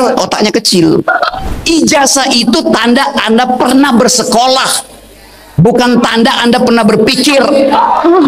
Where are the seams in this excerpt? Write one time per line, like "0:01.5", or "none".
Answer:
0:01.5